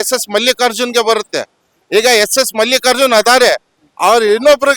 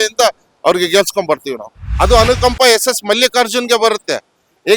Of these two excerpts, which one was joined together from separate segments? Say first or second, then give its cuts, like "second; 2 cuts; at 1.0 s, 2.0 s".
second; 1 cut; at 1.8 s